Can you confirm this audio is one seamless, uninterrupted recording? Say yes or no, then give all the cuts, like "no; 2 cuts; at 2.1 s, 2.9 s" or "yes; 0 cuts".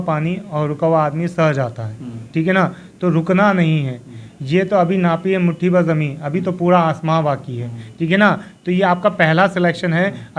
yes; 0 cuts